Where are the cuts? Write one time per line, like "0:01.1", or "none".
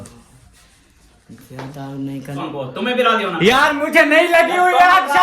0:02.5